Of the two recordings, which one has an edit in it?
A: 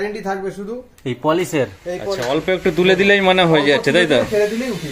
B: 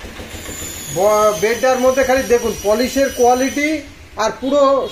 A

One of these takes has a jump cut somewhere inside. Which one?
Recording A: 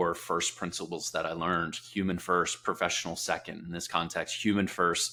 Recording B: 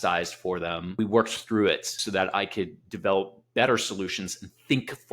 B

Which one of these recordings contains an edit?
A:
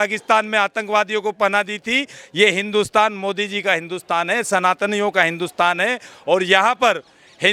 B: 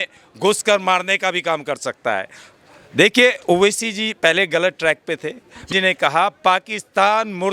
B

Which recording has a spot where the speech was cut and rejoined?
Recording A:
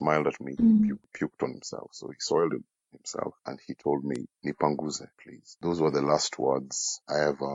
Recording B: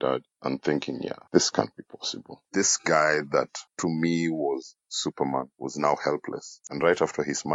B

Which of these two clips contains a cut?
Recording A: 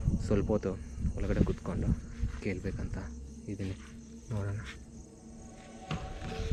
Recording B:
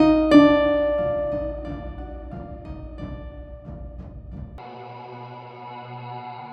B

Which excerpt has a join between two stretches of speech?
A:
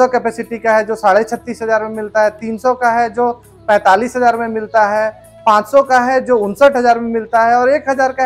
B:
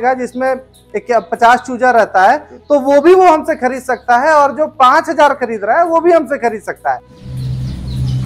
B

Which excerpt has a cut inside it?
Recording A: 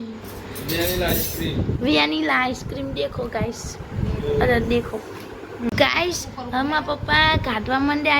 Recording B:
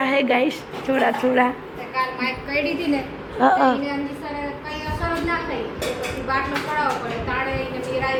A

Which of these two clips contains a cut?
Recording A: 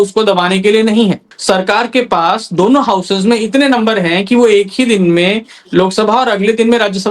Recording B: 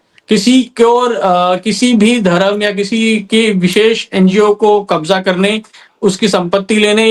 A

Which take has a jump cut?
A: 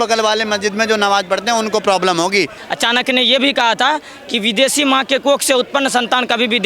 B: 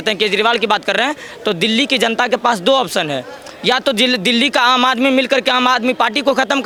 A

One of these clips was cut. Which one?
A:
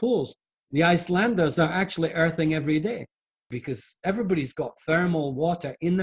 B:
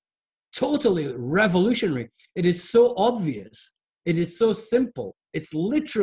A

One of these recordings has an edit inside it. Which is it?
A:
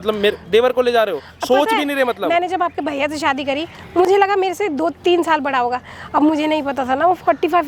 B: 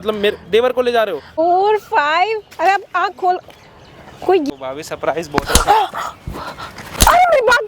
B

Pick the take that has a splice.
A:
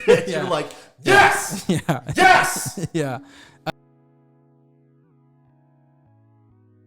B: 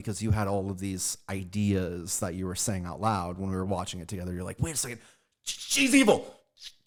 A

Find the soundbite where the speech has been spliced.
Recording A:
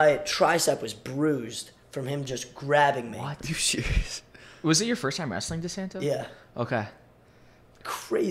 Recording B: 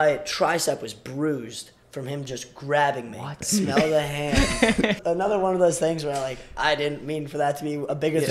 B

